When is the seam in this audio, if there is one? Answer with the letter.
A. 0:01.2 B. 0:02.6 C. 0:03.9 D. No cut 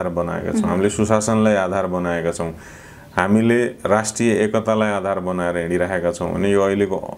D